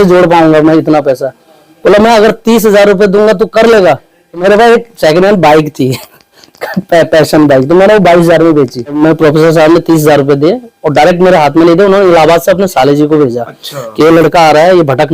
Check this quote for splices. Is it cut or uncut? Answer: cut